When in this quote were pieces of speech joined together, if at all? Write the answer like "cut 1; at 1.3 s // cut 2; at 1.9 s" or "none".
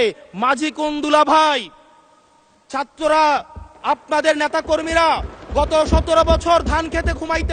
none